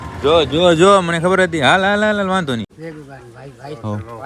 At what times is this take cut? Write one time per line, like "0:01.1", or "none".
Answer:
0:02.7